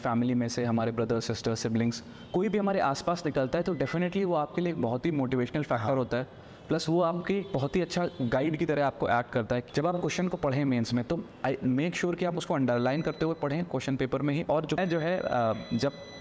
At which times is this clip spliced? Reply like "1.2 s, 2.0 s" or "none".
9.6 s, 14.8 s